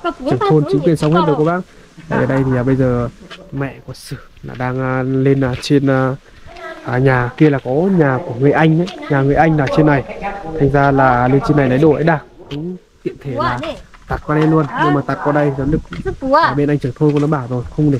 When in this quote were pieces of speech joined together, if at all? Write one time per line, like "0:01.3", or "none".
none